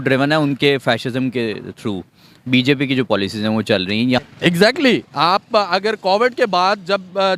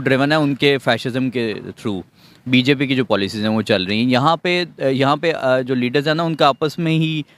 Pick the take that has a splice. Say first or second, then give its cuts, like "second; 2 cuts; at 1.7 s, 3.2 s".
first; 1 cut; at 4.2 s